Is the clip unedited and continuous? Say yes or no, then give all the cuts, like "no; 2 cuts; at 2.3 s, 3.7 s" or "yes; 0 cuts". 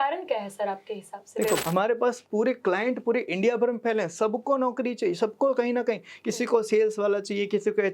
no; 1 cut; at 1.6 s